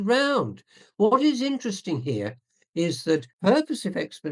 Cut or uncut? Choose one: cut